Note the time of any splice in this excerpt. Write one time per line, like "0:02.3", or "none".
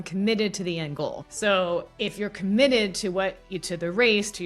0:01.2